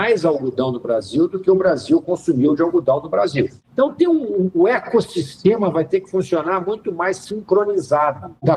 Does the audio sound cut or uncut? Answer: cut